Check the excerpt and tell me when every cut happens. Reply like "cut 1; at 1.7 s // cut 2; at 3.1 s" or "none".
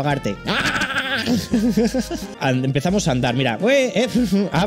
cut 1; at 2.3 s